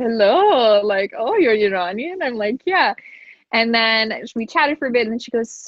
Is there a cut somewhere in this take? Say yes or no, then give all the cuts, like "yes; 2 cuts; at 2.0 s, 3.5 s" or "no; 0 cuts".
no; 0 cuts